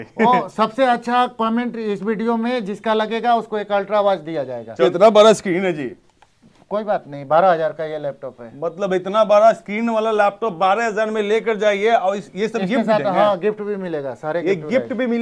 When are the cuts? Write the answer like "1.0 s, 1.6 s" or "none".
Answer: 4.8 s